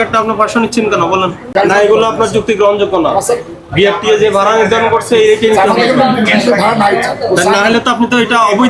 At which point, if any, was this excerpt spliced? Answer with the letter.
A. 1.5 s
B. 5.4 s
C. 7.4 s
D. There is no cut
A